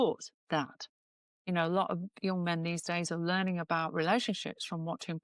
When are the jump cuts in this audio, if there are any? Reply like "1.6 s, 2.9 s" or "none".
none